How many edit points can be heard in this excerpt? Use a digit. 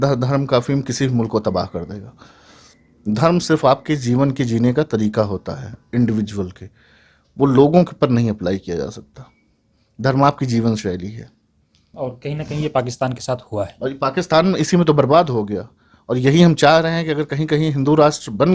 0